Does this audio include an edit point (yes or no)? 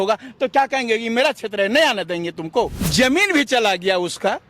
yes